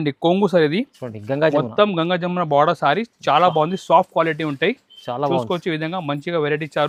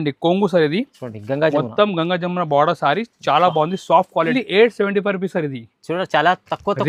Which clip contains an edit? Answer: second; 1 cut; at 4.3 s

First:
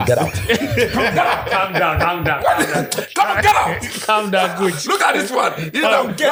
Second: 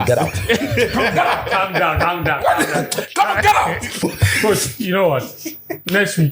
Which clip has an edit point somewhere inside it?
second; 1 cut; at 4.0 s

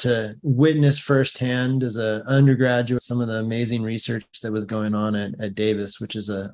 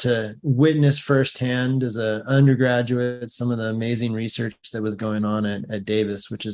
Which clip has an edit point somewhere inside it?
first; 1 cut; at 3.0 s

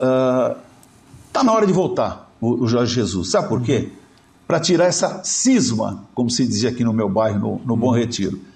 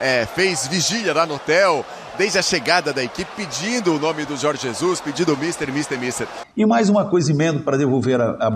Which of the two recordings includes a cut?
second; 1 cut; at 6.4 s

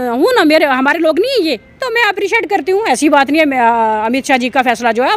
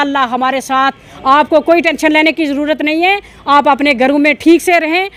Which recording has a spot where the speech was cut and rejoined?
first; 1 cut; at 1.8 s

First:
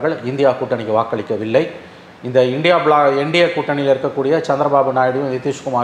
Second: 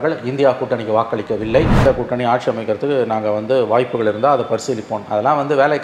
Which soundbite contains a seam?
second; 1 cut; at 1.9 s

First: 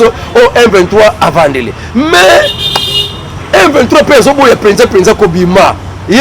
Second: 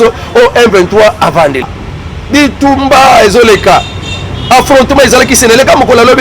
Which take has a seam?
second; 1 cut; at 1.8 s

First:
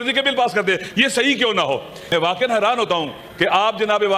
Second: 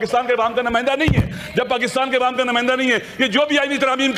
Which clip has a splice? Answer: first; 1 cut; at 2.1 s

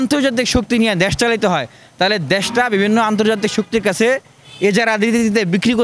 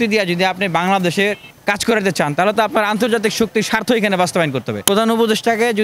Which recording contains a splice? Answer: second; 2 cuts; at 1.5 s, 4.7 s

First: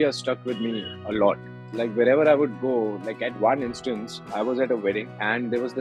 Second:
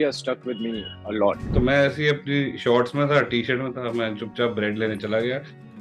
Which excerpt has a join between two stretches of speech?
second; 1 cut; at 1.4 s

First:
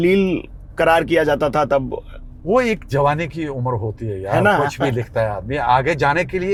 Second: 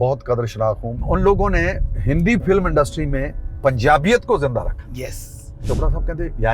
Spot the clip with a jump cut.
second; 3 cuts; at 0.9 s, 1.9 s, 5.7 s

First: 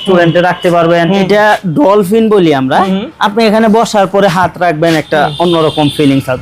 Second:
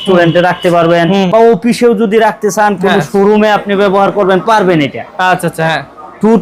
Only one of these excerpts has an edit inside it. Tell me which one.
first; 1 cut; at 1.2 s

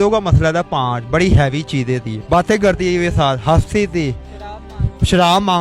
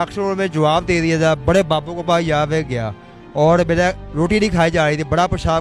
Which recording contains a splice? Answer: first; 1 cut; at 2.1 s

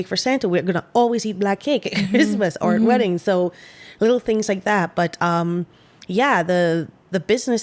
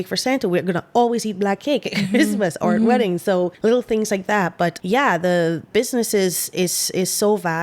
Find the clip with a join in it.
second; 3 cuts; at 3.5 s, 4.8 s, 5.7 s

